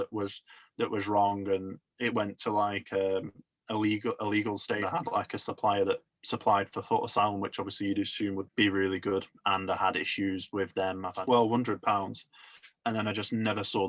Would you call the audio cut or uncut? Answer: cut